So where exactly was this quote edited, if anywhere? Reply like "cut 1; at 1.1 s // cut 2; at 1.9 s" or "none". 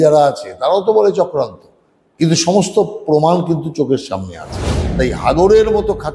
cut 1; at 4.8 s